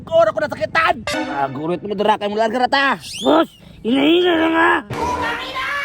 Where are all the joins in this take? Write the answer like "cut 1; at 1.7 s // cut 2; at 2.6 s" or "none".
cut 1; at 1.1 s // cut 2; at 4.9 s